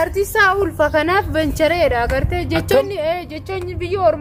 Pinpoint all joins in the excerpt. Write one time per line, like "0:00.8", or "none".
none